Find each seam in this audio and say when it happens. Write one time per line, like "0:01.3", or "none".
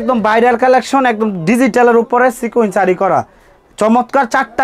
none